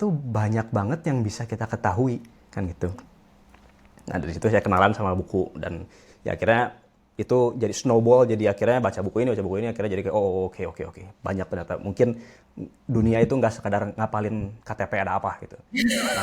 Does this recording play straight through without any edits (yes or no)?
yes